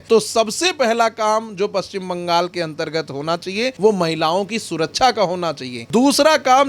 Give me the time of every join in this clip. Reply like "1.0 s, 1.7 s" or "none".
3.7 s, 5.7 s